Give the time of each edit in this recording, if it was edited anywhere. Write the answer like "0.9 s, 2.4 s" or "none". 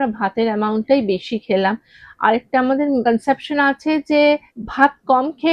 3.0 s, 4.6 s